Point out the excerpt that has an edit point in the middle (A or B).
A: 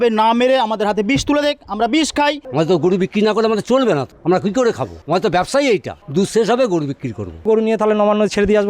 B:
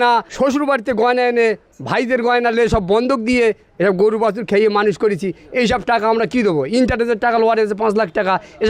A